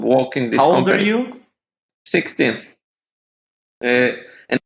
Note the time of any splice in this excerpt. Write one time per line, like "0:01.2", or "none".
0:01.9